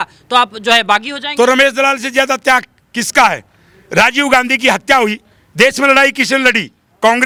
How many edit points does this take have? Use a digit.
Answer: 0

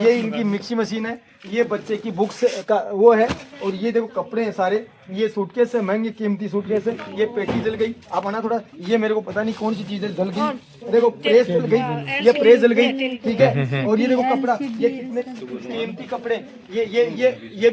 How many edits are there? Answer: 0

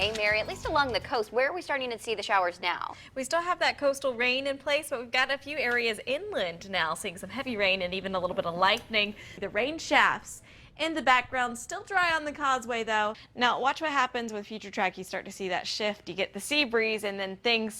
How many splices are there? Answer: 2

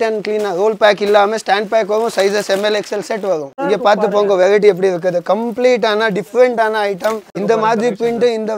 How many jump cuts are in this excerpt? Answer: 2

